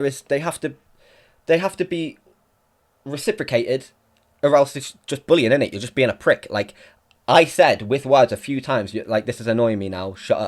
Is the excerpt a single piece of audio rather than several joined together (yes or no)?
yes